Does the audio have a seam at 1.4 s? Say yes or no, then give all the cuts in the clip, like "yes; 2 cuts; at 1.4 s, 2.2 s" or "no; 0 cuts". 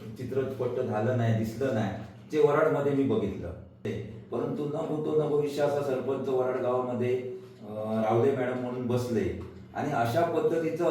no; 1 cut; at 3.9 s